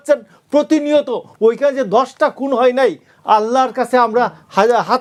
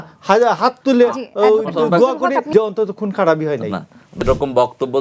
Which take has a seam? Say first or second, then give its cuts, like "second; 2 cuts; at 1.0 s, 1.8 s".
second; 2 cuts; at 2.5 s, 4.2 s